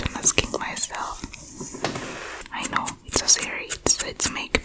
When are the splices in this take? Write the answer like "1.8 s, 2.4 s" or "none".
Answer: 2.5 s